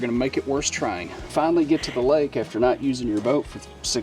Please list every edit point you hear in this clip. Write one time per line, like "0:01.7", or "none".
0:01.3